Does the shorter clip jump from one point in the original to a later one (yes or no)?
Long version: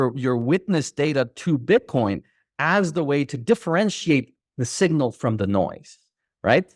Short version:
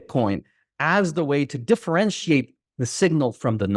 no